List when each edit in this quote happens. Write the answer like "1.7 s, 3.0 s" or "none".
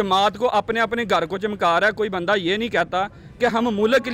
none